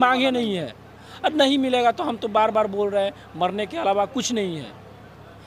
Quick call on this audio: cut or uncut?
uncut